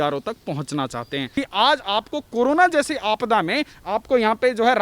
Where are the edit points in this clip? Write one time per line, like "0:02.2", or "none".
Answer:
0:01.3